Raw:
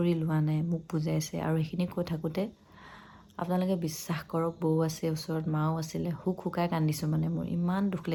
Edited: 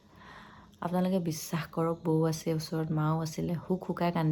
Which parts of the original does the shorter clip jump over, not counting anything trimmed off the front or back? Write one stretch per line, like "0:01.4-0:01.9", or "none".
none